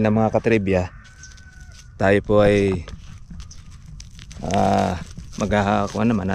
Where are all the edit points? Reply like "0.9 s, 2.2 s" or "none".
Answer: none

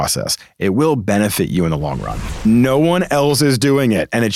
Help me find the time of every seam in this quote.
2.4 s

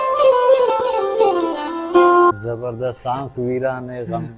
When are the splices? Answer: none

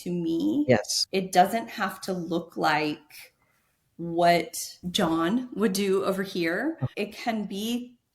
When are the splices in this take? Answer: 1.0 s, 4.8 s, 6.9 s

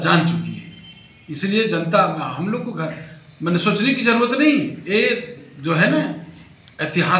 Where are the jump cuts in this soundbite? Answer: none

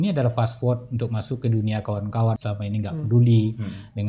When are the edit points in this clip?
2.4 s

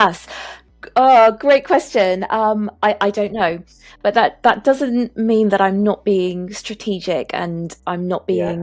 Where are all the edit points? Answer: none

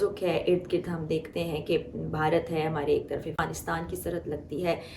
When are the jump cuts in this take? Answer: 3.4 s

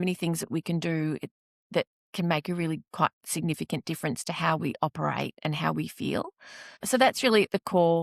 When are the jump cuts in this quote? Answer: 6.7 s

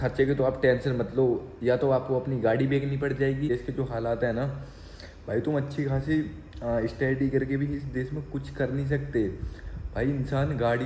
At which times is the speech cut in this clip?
3.5 s

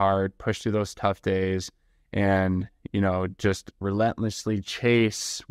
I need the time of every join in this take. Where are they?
3.8 s

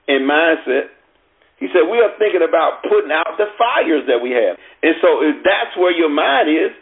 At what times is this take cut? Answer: 4.7 s

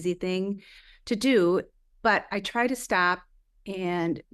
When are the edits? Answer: none

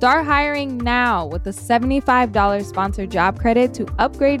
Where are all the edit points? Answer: none

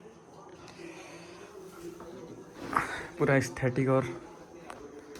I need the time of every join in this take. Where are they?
none

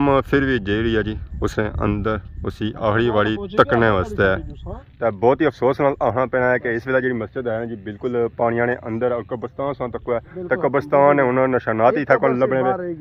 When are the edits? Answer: none

